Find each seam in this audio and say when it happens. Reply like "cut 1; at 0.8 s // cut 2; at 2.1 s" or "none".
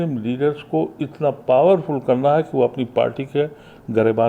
none